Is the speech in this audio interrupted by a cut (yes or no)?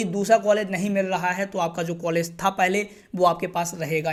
no